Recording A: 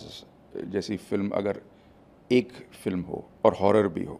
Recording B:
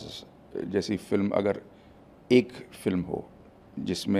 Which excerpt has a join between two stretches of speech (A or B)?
A